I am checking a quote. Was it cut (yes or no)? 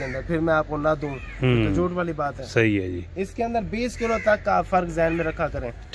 no